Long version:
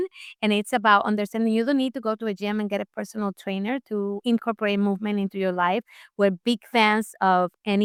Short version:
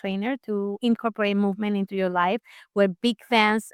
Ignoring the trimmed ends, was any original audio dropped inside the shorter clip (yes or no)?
no